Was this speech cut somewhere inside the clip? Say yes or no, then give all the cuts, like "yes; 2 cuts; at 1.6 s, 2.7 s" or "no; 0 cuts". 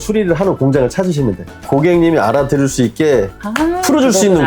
yes; 1 cut; at 1.6 s